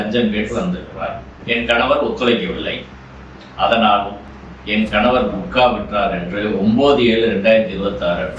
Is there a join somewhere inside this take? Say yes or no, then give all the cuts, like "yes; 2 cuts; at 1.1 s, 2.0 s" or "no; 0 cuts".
yes; 1 cut; at 1.3 s